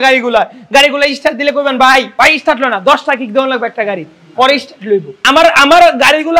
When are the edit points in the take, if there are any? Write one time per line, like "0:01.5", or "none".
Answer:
0:02.1
0:05.1